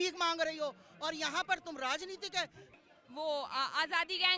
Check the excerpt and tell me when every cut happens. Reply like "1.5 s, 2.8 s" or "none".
2.6 s